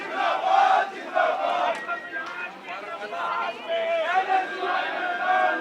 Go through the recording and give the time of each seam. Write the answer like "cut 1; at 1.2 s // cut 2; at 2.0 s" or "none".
none